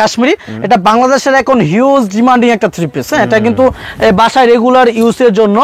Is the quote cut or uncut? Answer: uncut